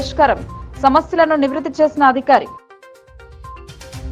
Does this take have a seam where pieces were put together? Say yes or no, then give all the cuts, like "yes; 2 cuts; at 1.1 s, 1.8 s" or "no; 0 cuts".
no; 0 cuts